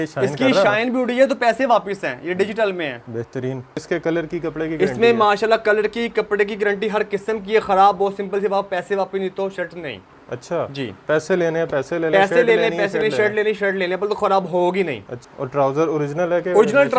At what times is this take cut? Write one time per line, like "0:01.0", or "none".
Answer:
0:03.8
0:15.2